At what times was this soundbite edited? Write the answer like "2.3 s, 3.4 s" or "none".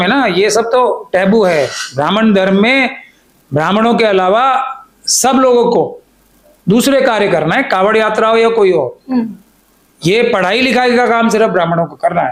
none